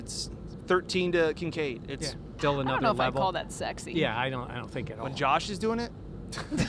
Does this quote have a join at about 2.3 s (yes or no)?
yes